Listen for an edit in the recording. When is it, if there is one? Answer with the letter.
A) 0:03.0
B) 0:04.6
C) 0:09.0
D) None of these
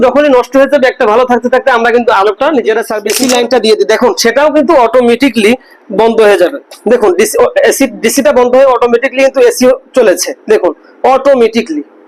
A